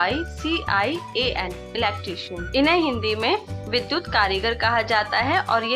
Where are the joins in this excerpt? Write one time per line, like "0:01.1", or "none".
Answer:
0:02.3